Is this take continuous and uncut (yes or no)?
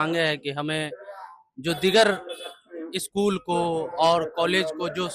yes